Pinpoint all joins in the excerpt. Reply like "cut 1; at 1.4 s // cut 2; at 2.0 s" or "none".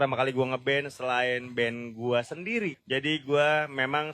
cut 1; at 2.8 s